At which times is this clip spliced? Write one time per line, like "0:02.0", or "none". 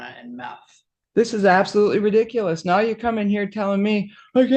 0:01.1